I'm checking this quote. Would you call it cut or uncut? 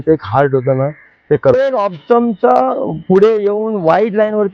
cut